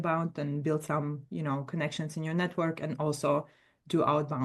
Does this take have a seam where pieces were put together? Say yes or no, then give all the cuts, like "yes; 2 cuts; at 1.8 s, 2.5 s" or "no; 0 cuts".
no; 0 cuts